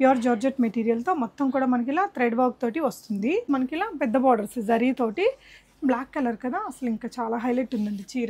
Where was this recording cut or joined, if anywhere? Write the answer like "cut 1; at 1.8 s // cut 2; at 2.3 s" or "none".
cut 1; at 3.4 s